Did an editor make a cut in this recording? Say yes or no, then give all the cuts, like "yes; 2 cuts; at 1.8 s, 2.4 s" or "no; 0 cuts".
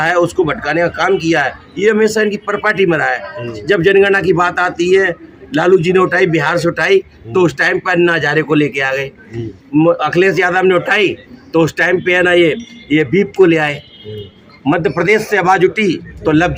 no; 0 cuts